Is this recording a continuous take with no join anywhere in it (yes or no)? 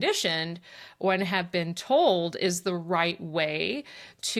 yes